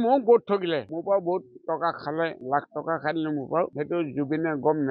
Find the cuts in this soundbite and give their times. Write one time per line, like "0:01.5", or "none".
0:00.9
0:02.4
0:03.7